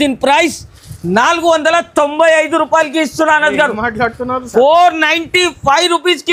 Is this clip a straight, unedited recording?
yes; 0 cuts

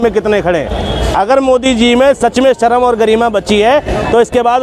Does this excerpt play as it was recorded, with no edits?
yes; 0 cuts

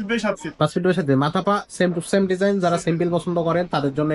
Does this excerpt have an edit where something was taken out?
no; 0 cuts

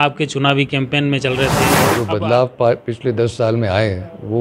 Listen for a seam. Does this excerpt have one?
yes; 1 cut; at 1.9 s

